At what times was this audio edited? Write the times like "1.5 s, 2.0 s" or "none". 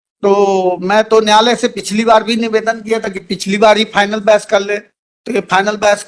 none